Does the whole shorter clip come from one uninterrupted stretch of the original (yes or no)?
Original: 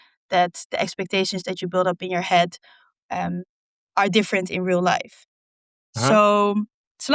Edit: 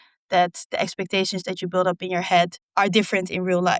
no